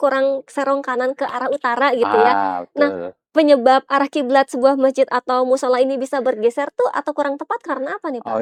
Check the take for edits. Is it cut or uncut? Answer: uncut